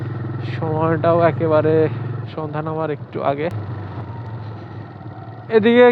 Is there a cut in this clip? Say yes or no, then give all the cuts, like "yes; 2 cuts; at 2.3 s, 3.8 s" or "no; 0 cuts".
yes; 1 cut; at 3.7 s